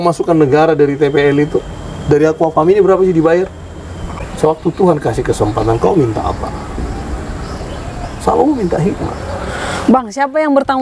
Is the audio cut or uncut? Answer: cut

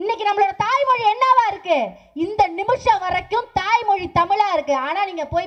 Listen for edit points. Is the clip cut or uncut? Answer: uncut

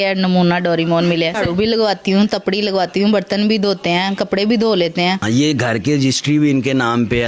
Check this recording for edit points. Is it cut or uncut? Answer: cut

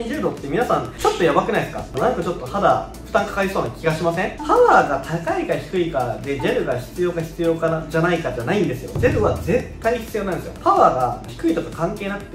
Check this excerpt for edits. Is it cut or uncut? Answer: cut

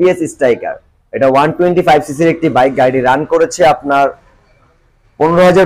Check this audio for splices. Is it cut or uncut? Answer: uncut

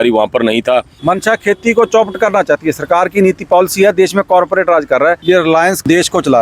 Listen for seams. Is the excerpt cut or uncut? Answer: cut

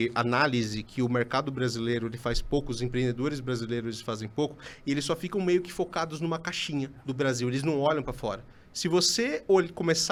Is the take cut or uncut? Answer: uncut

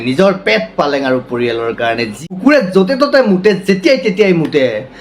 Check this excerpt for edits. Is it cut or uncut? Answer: cut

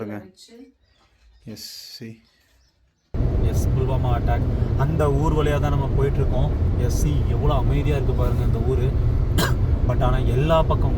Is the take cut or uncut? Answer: cut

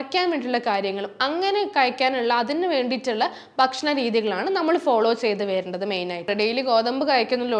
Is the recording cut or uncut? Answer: cut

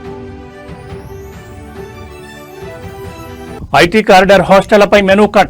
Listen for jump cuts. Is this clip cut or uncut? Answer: cut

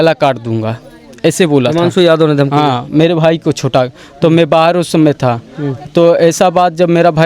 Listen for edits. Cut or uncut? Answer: uncut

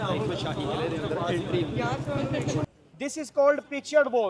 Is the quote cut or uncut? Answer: cut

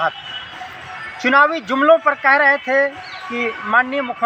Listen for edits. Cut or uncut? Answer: uncut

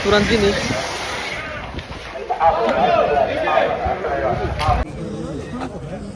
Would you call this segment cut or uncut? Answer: uncut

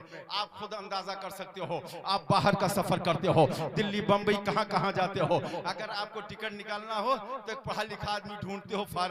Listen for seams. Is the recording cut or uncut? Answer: uncut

